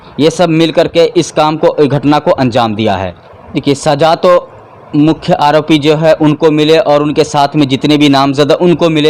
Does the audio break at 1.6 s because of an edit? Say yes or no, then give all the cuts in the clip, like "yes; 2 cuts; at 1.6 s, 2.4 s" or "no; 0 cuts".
no; 1 cut; at 3.1 s